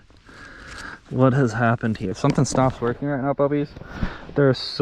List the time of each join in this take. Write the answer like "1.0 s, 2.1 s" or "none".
2.1 s